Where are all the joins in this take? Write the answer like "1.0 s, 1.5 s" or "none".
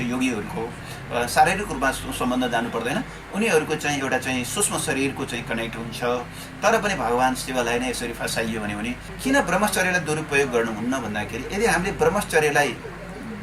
9.1 s